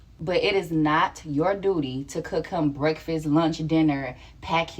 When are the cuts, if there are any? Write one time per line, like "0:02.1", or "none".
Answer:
none